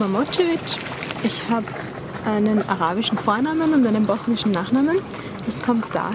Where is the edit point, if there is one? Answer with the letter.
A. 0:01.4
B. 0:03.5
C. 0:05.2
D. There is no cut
D